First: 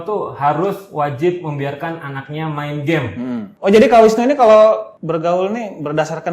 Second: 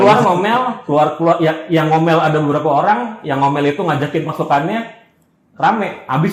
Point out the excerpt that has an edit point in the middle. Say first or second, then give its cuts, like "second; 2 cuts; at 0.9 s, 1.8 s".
first; 2 cuts; at 3.5 s, 4.9 s